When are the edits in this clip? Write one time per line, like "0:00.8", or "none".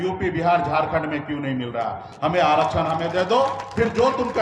none